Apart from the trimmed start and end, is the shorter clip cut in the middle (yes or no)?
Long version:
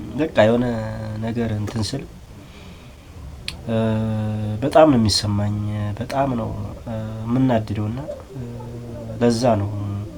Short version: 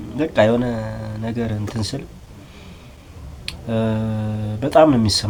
no